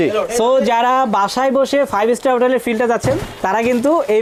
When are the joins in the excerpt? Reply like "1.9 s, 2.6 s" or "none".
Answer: none